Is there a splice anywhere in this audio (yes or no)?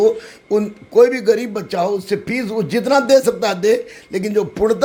no